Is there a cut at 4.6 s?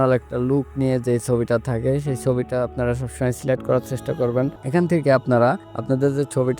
yes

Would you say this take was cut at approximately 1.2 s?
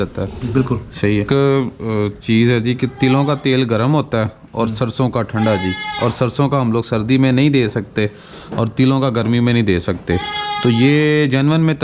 yes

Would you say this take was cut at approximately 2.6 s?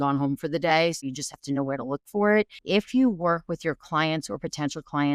yes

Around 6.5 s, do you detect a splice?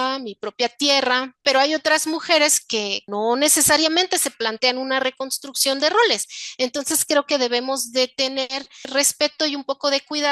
no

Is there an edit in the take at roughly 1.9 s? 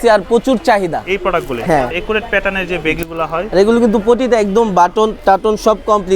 yes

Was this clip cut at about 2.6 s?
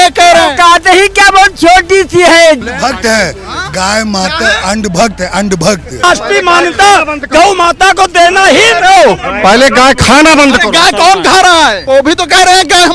yes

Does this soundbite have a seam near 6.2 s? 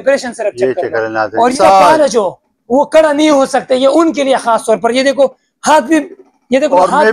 no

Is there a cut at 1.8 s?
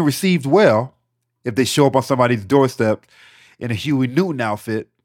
no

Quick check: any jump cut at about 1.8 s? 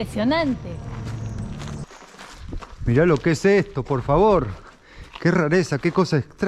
yes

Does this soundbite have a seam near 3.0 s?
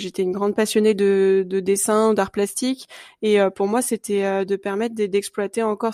no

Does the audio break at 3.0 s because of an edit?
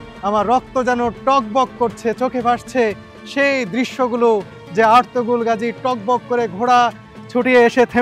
no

